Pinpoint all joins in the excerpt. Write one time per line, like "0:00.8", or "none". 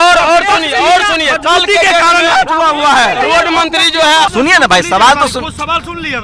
0:04.3